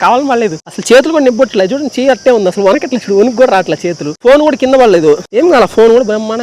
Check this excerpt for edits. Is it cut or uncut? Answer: uncut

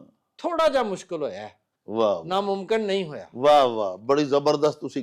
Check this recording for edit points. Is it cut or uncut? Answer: uncut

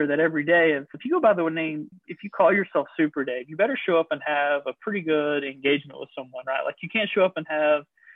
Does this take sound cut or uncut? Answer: uncut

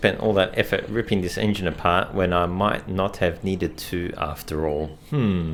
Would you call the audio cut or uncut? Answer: uncut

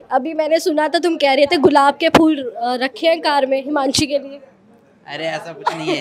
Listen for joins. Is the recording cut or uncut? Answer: uncut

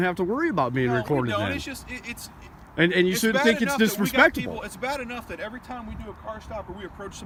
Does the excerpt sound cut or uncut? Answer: uncut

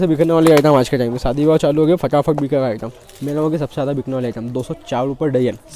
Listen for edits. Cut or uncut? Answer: cut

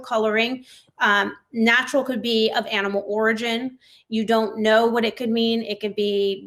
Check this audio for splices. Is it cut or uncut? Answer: uncut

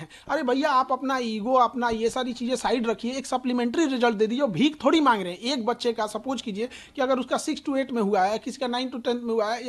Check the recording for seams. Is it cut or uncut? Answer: uncut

